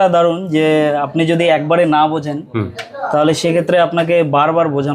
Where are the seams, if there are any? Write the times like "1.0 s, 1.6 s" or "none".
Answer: none